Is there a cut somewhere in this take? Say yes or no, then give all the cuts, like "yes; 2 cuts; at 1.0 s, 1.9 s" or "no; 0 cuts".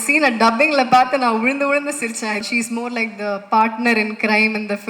yes; 1 cut; at 2.4 s